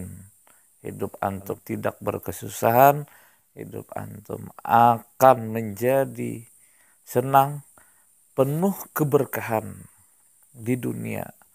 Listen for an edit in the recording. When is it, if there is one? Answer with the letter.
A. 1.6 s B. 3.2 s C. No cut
A